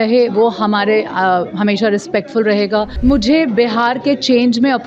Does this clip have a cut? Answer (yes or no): yes